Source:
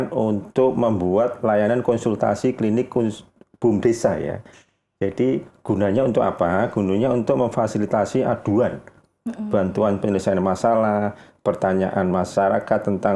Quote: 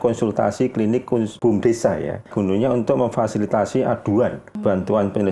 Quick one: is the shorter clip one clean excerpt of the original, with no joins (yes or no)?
no